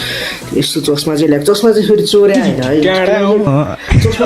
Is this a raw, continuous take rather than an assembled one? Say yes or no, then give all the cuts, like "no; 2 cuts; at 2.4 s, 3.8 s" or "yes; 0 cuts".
yes; 0 cuts